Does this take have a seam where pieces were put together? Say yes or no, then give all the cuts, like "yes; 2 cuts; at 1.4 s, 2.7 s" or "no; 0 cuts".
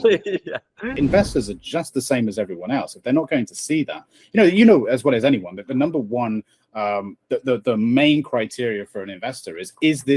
yes; 1 cut; at 1.0 s